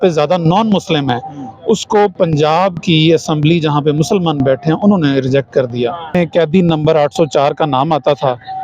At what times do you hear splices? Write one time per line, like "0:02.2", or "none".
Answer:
0:06.1